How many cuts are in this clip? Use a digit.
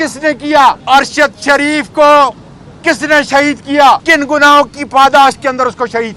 2